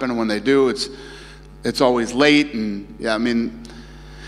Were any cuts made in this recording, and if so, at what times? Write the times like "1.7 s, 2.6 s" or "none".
none